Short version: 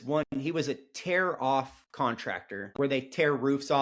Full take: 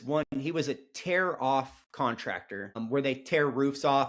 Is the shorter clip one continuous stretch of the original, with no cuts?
no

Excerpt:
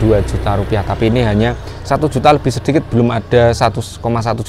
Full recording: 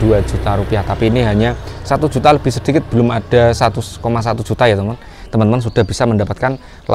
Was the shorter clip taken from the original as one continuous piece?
yes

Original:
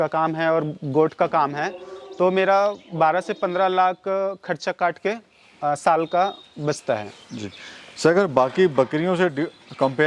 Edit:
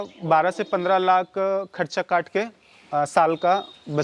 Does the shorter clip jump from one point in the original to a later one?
no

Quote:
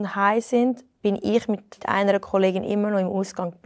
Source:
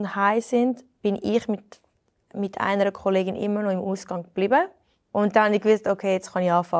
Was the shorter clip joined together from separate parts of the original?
yes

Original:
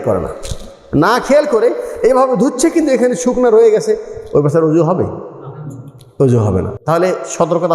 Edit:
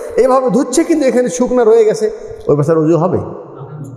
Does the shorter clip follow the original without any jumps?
yes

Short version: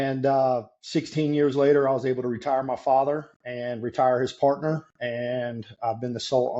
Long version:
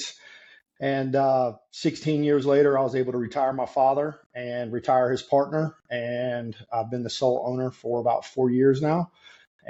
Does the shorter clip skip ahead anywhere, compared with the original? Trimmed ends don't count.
no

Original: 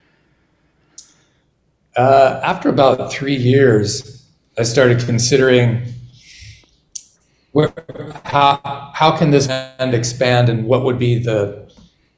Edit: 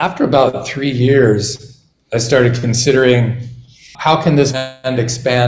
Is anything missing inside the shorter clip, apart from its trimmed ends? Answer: yes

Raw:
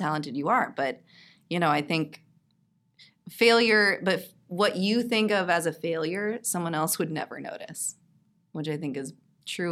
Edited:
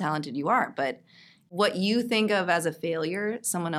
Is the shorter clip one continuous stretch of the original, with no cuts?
no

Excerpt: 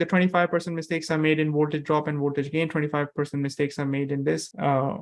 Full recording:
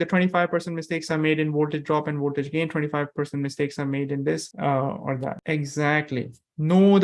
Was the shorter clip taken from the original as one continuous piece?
yes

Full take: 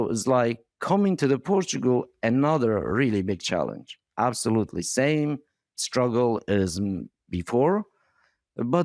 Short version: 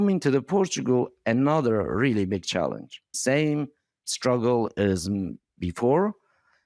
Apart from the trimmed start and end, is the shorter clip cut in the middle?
yes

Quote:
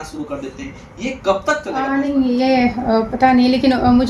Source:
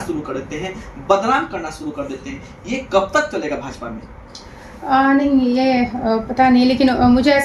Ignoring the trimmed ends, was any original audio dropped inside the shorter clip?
yes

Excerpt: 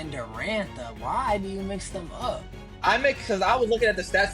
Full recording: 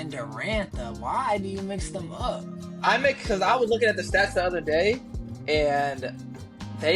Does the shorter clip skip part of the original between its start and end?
no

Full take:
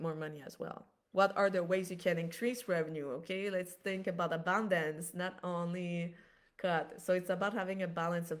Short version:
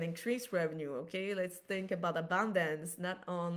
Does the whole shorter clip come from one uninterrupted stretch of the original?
yes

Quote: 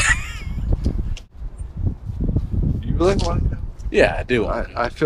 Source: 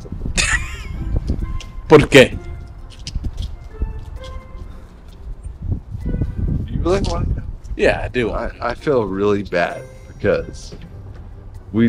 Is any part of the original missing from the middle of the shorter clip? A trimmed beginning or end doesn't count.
yes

